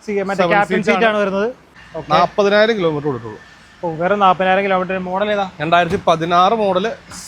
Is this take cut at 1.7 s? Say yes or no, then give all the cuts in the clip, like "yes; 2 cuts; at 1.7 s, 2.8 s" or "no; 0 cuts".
yes; 1 cut; at 1.7 s